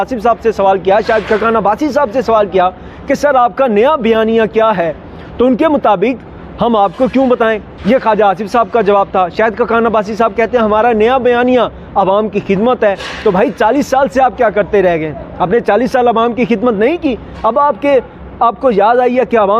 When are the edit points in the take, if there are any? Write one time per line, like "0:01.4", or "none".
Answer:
none

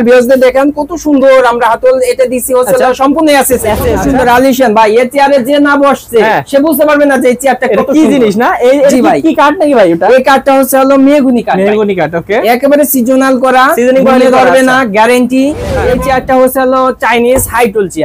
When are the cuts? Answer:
0:04.0
0:15.8

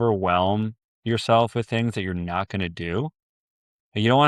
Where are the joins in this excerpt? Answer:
none

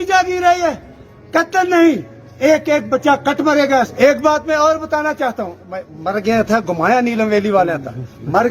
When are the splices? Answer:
0:03.9

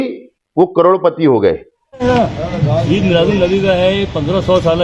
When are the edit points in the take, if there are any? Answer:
0:02.0

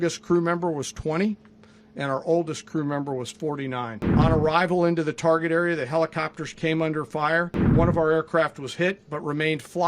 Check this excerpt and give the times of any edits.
0:04.0
0:07.6

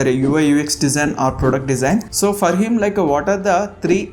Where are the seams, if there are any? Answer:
0:02.1

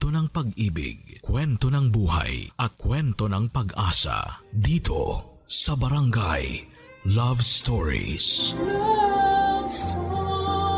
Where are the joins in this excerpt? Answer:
none

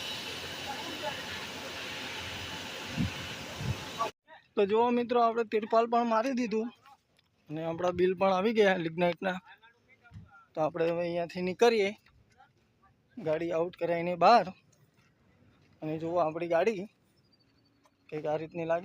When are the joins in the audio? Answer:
0:04.2

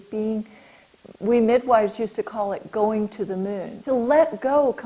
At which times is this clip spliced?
0:03.7

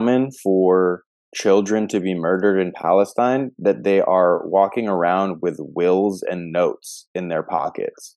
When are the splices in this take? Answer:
none

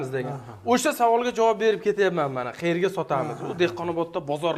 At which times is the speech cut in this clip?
none

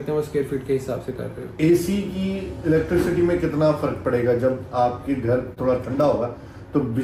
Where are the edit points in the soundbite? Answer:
0:01.5
0:05.6

